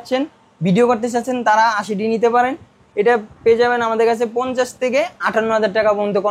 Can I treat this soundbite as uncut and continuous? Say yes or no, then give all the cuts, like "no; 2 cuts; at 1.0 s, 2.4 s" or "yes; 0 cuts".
yes; 0 cuts